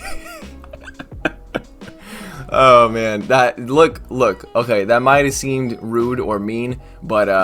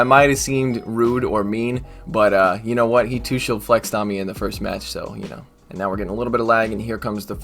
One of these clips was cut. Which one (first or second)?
second